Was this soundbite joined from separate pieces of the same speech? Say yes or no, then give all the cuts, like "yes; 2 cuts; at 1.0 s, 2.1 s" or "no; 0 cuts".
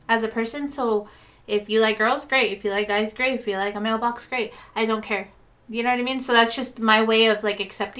no; 0 cuts